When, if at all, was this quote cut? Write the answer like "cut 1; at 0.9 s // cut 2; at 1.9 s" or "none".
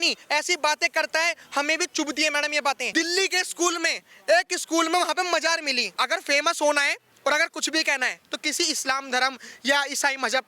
cut 1; at 2.8 s // cut 2; at 5.9 s